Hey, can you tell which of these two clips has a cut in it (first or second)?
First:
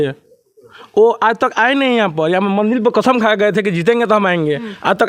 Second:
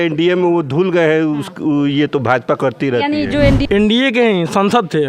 second